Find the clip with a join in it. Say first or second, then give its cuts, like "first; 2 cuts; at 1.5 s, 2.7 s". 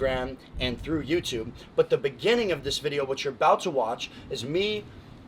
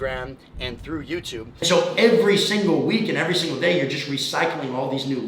second; 1 cut; at 1.6 s